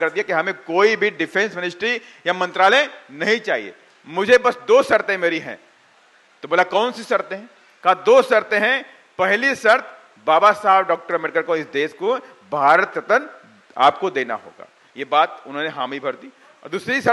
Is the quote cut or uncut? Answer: uncut